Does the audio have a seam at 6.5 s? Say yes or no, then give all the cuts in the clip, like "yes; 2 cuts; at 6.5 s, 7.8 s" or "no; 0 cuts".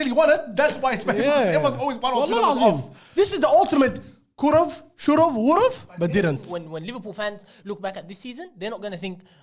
yes; 1 cut; at 6.5 s